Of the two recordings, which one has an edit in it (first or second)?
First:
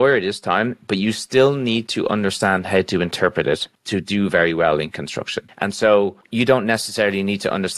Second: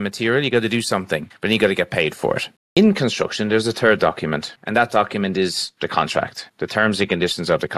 second